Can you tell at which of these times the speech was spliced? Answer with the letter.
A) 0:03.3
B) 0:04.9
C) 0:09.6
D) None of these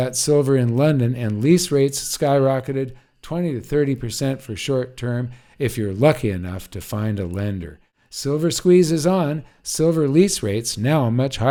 D